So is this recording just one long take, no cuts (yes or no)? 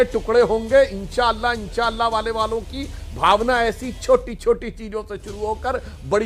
yes